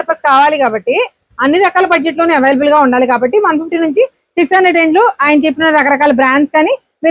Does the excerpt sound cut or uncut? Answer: uncut